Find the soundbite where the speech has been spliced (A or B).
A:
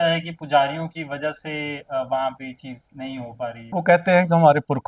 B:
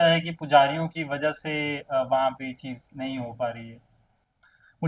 A